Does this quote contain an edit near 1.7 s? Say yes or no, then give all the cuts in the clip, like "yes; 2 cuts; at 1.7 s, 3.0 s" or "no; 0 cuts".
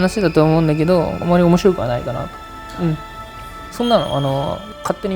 no; 1 cut; at 3.6 s